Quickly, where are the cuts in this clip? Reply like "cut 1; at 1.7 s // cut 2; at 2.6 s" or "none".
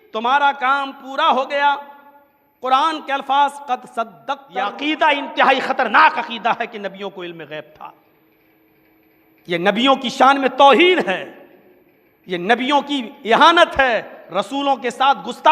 cut 1; at 4.7 s